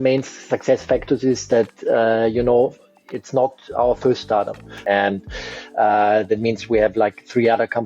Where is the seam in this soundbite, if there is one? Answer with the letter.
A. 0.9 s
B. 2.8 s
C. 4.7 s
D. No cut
C